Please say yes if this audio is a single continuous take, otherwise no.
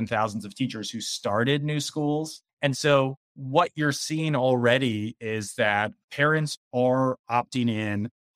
no